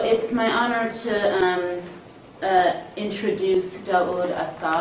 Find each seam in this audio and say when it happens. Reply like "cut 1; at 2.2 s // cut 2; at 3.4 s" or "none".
none